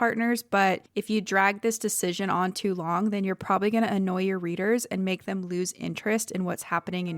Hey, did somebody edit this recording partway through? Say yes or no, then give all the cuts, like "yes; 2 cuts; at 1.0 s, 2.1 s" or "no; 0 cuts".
yes; 1 cut; at 0.9 s